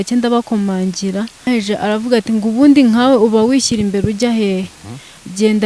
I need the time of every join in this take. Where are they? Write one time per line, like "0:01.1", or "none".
0:01.4

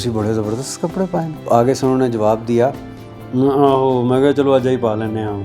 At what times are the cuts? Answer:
0:01.5

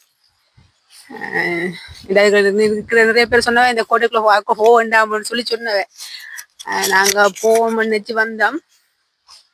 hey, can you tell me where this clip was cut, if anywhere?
none

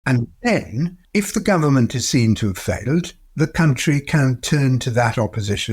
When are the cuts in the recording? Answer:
0:01.0

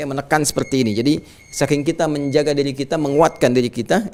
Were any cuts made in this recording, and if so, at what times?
none

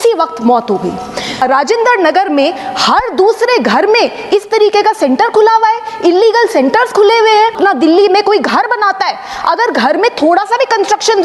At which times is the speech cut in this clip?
0:01.4
0:07.5

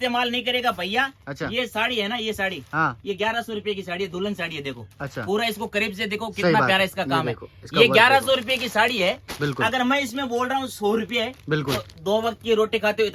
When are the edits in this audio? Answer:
none

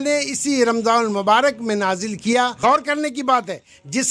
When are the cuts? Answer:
0:02.5

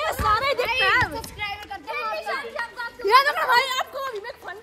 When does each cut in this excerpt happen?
none

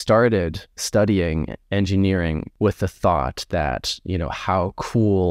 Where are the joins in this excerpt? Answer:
0:01.6
0:02.5

